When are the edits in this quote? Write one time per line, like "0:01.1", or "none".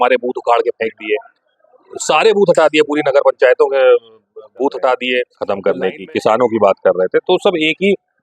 0:05.3